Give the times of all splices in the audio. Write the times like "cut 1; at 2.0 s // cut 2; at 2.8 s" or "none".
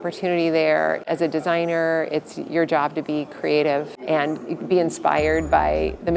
cut 1; at 1.0 s // cut 2; at 3.9 s